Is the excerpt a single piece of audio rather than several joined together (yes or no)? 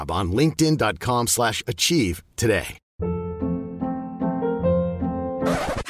no